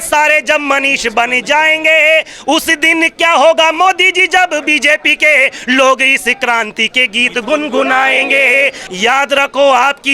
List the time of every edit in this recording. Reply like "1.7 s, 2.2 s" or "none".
8.8 s